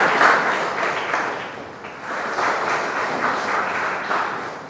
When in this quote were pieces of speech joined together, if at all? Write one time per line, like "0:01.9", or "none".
0:02.1